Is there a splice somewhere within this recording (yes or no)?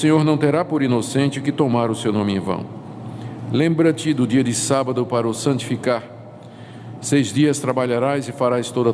no